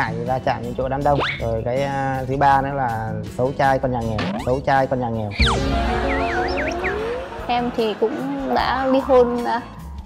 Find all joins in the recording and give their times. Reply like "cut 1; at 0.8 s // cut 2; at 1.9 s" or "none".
cut 1; at 7.2 s